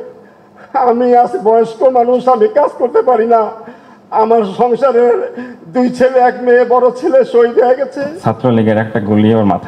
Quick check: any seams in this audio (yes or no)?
yes